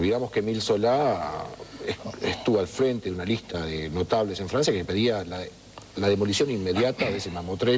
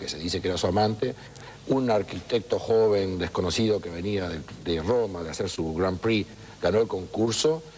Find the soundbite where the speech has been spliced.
first; 1 cut; at 3.4 s

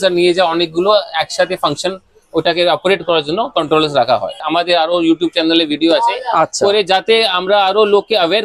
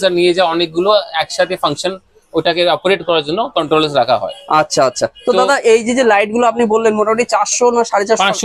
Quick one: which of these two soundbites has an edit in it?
first; 1 cut; at 4.4 s

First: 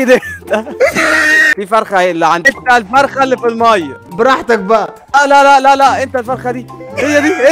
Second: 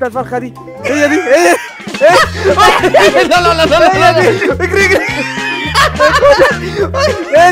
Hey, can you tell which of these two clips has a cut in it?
first; 3 cuts; at 2.5 s, 4.0 s, 5.0 s

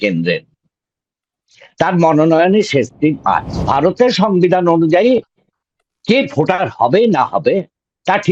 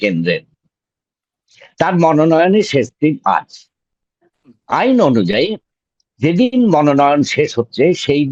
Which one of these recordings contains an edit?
first; 1 cut; at 3.7 s

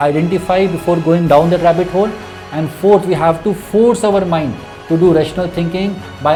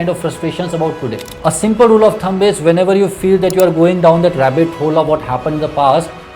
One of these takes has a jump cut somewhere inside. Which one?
second; 1 cut; at 1.3 s

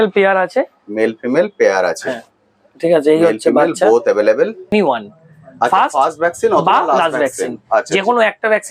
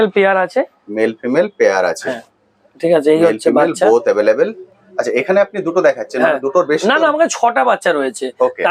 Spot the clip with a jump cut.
first; 1 cut; at 4.7 s

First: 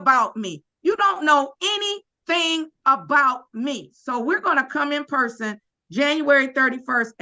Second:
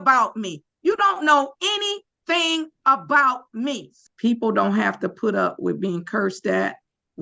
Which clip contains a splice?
second; 1 cut; at 3.9 s

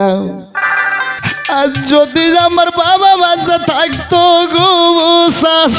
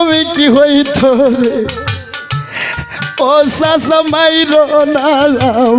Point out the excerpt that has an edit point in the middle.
first; 1 cut; at 1.2 s

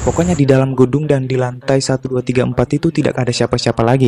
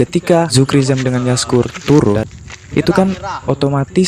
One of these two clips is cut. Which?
second; 1 cut; at 2.2 s

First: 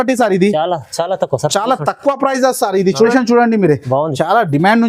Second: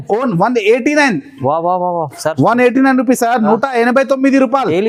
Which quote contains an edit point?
first; 1 cut; at 3.1 s

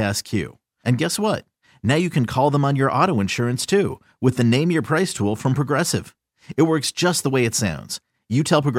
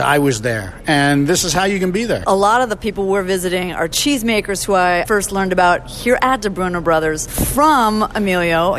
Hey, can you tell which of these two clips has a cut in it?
second; 4 cuts; at 2.2 s, 4.0 s, 5.0 s, 7.3 s

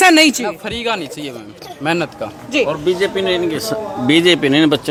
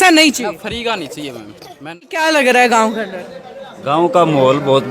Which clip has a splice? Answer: second; 1 cut; at 2.1 s

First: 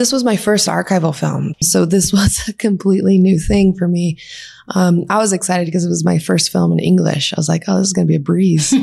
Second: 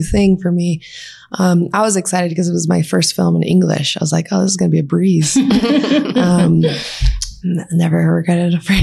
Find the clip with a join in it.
first; 1 cut; at 1.7 s

